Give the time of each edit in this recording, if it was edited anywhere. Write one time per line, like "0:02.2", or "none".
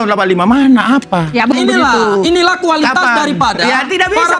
0:01.5